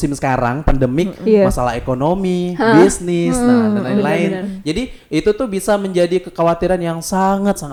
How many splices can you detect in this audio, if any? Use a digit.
0